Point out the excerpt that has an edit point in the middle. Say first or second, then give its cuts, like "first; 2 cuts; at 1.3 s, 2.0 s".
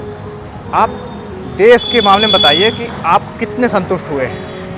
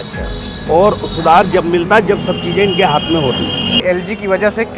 second; 1 cut; at 3.8 s